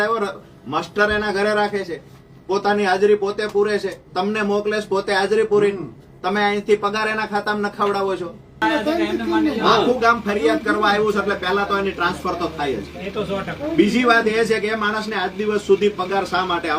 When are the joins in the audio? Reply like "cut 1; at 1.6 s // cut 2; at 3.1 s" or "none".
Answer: cut 1; at 8.6 s